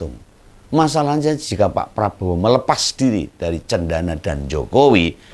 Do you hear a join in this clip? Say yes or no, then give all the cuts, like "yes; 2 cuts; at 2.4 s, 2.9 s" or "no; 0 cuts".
no; 0 cuts